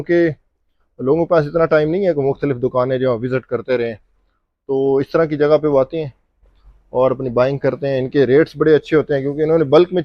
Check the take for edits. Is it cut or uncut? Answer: uncut